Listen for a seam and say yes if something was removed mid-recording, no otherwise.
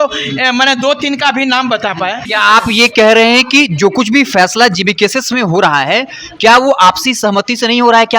yes